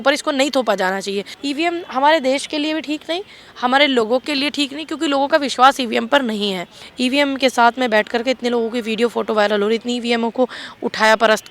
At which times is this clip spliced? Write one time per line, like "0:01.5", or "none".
0:01.3
0:06.8